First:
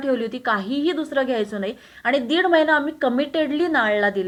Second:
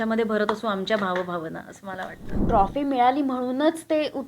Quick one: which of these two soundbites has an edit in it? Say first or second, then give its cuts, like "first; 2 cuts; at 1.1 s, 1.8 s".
second; 1 cut; at 2.4 s